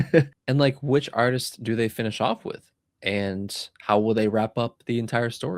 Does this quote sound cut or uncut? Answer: uncut